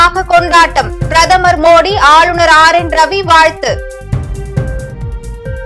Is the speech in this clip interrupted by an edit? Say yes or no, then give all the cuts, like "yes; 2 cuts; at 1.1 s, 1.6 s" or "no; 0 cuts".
yes; 1 cut; at 3.9 s